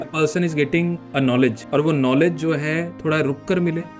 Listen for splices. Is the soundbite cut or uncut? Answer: cut